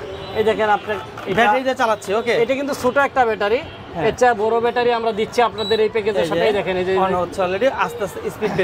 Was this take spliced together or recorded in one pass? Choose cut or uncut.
uncut